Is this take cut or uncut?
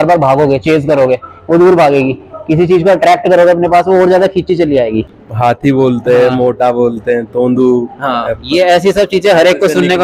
cut